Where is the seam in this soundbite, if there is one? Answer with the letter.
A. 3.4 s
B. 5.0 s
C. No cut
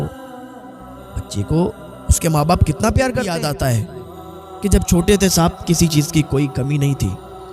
A